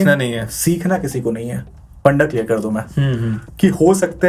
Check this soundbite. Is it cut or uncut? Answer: cut